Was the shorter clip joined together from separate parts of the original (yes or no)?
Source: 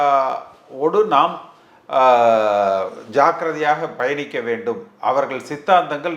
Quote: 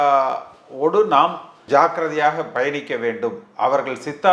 yes